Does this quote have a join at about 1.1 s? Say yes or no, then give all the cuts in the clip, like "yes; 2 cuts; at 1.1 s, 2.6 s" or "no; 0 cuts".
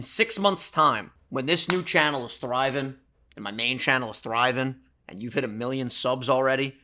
yes; 1 cut; at 1.1 s